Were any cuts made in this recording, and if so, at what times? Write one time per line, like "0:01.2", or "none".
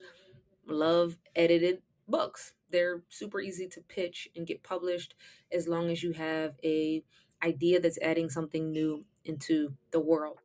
none